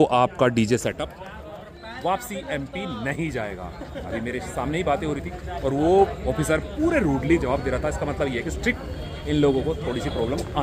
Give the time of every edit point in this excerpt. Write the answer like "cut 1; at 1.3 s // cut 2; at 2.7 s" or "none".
none